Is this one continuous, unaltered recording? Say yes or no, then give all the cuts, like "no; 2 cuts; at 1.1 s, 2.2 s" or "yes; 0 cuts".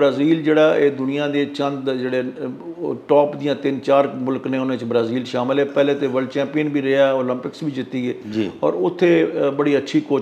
yes; 0 cuts